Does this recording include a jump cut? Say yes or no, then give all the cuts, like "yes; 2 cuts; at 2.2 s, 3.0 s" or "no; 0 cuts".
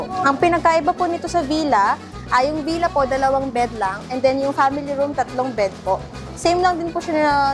no; 0 cuts